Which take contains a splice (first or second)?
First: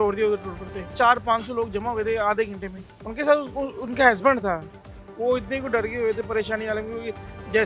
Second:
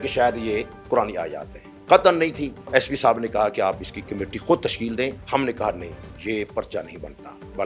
second